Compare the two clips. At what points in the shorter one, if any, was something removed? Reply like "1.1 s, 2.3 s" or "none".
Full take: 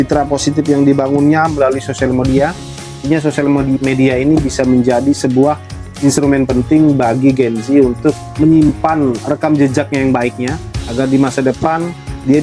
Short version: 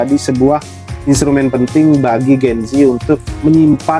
none